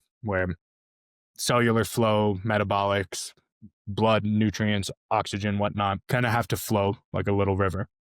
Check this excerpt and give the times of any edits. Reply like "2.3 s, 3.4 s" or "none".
6.0 s